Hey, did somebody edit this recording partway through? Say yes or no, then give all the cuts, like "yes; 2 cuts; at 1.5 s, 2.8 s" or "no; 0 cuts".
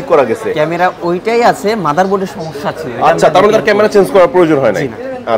no; 0 cuts